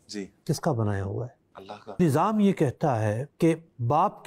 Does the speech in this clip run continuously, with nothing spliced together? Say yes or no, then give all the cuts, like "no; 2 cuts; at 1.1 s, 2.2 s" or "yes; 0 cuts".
no; 1 cut; at 2.0 s